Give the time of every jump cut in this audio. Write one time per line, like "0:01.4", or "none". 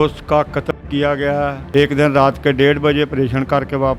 0:01.6